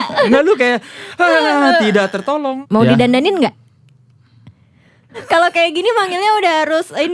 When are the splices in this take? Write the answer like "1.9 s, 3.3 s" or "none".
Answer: 2.5 s, 4.9 s